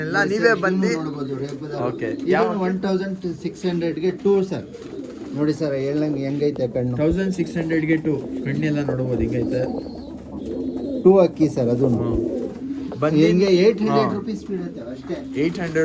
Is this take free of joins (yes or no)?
yes